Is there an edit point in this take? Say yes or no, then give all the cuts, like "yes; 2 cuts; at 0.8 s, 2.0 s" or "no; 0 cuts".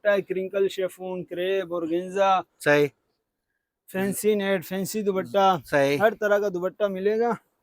no; 0 cuts